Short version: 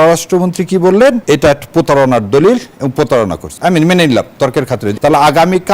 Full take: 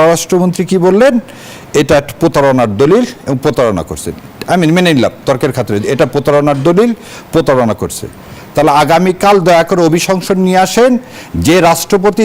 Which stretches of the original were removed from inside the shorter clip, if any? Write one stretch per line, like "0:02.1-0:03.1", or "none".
0:01.2-0:01.7
0:03.9-0:04.3
0:05.8-0:08.4